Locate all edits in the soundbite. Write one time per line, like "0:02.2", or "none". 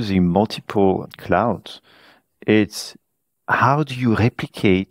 0:01.0